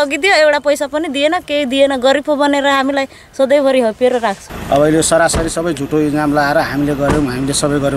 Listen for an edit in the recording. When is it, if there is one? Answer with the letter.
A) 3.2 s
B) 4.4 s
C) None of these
B